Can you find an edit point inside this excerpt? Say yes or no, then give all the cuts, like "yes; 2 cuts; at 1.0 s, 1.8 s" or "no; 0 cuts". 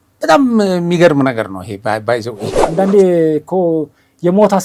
yes; 1 cut; at 2.5 s